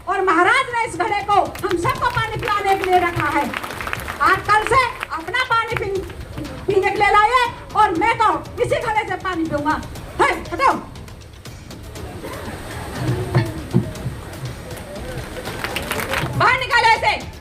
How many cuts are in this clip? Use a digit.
1